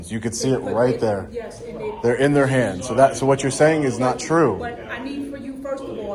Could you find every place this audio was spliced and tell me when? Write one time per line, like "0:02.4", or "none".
none